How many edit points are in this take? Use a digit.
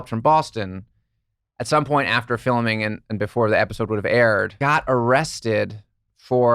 1